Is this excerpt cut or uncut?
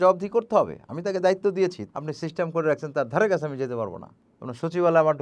cut